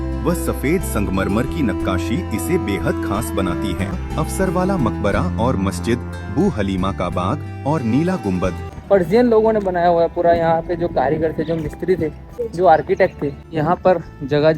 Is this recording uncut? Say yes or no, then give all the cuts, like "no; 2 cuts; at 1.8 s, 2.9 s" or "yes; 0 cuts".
no; 4 cuts; at 3.9 s, 8.7 s, 12.3 s, 13.4 s